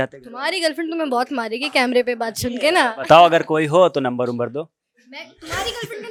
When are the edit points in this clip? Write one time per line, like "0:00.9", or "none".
none